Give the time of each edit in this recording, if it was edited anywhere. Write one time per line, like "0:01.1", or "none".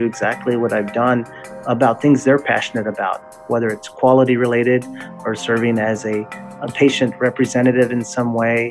0:06.4